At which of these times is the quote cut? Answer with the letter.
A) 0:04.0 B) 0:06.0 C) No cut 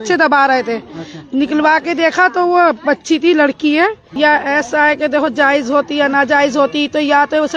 A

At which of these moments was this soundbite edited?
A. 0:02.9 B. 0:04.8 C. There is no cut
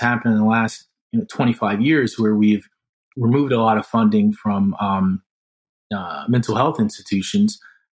C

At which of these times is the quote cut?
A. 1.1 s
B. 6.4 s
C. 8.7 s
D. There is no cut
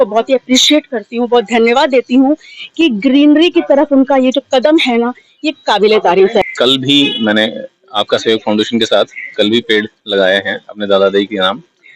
B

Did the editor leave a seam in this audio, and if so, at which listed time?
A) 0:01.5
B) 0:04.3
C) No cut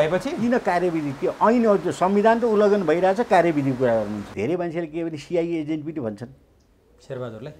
B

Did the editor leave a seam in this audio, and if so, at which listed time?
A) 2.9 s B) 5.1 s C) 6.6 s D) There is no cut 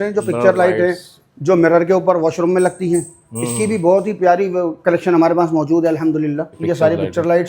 C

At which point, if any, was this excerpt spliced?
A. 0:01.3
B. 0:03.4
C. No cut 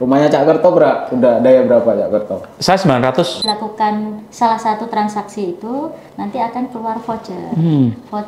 B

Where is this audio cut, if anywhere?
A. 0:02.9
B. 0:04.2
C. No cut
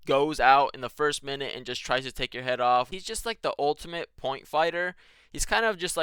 A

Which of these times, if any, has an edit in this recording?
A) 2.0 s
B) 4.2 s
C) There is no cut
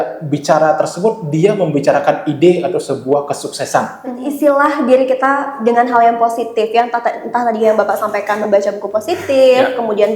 B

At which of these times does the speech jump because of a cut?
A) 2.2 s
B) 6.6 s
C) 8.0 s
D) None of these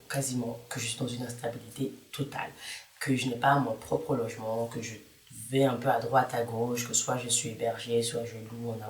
D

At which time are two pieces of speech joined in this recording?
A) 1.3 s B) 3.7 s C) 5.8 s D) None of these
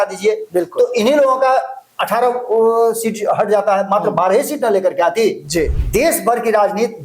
C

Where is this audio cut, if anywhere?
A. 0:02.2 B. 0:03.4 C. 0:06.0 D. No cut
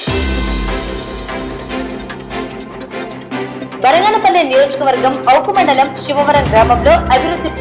D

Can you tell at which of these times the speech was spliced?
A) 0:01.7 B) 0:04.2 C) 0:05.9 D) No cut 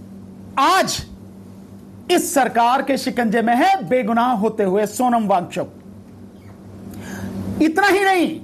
D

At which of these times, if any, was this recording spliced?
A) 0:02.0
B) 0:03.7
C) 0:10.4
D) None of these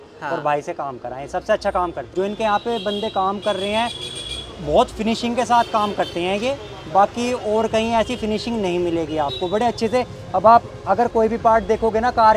A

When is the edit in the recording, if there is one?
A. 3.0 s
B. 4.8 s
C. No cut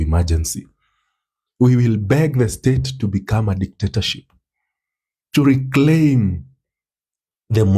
C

